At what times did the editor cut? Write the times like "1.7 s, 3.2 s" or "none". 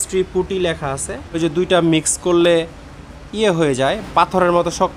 1.4 s